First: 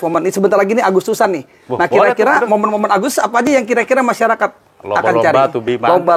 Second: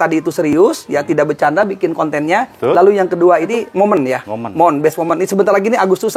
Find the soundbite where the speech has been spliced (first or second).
second